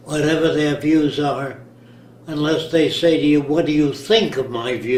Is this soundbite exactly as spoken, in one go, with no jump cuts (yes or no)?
yes